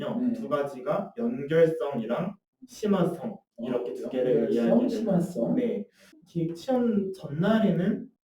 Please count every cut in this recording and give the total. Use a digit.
1